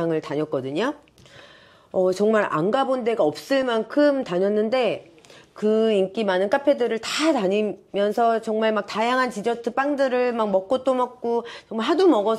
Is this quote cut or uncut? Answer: uncut